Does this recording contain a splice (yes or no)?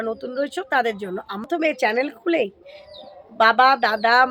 yes